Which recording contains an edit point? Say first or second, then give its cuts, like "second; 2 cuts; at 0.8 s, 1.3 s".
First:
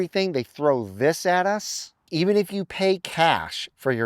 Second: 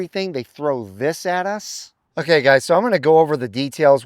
first; 1 cut; at 2.1 s